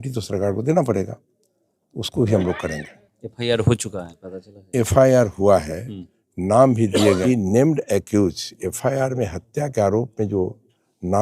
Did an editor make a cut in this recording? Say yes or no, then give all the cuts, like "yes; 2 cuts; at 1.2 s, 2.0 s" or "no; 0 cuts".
yes; 1 cut; at 7.2 s